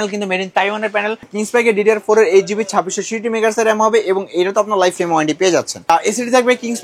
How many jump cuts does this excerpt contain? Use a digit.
2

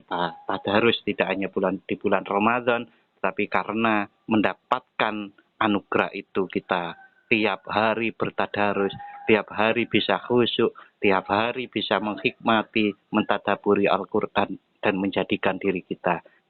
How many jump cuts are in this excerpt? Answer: 0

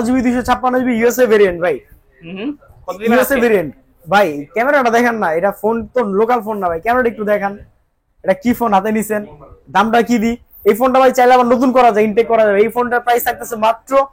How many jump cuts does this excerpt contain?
0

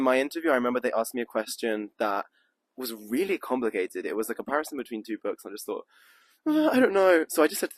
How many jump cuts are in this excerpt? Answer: 0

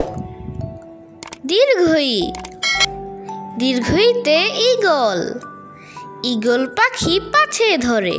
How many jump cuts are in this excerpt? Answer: 0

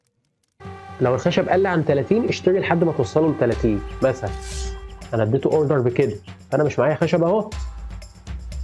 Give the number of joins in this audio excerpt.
0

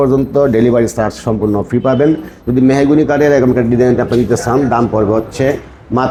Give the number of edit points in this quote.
0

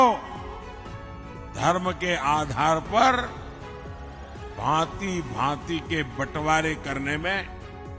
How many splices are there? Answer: 0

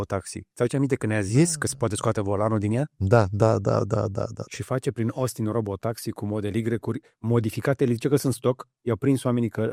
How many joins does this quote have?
0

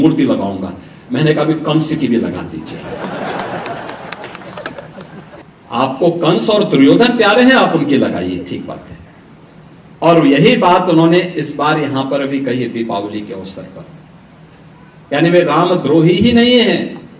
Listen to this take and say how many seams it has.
1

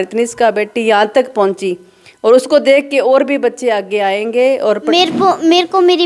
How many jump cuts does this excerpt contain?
1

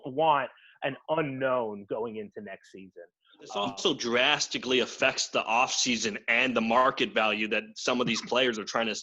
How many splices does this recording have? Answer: 1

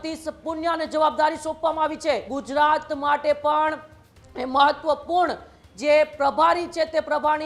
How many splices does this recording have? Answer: 1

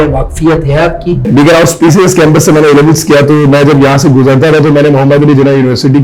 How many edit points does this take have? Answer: 1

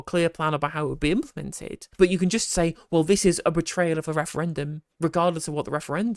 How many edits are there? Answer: 0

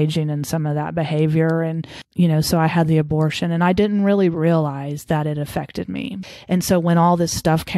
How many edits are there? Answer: 2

